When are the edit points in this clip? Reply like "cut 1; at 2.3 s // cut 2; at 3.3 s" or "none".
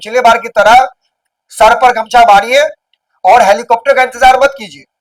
none